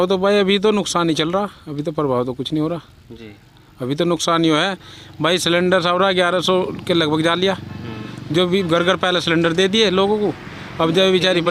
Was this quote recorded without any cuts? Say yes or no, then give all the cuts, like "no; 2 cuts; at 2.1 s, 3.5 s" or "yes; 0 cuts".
yes; 0 cuts